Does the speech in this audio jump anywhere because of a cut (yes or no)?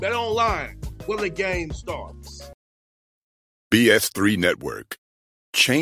yes